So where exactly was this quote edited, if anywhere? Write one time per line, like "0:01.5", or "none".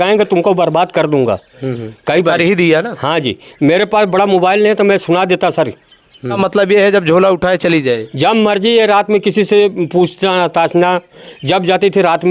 0:06.4